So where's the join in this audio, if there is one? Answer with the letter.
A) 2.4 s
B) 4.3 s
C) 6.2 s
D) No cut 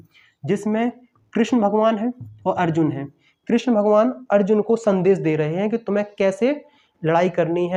D